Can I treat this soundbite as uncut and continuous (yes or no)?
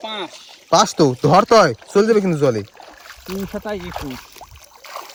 yes